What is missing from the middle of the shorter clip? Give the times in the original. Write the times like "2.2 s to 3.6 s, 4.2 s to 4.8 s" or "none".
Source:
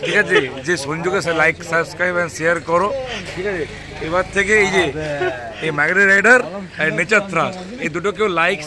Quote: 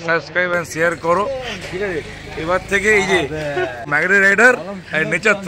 5.5 s to 5.7 s